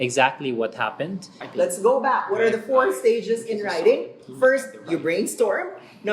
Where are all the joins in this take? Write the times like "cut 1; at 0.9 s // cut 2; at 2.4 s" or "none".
cut 1; at 1.4 s